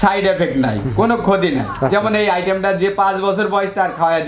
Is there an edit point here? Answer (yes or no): no